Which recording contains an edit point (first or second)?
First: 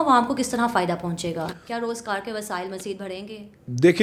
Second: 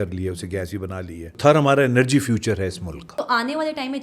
second